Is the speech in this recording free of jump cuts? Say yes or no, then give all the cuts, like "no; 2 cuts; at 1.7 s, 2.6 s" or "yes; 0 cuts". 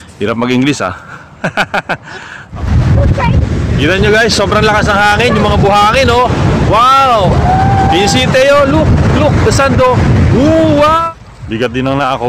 no; 2 cuts; at 2.5 s, 11.0 s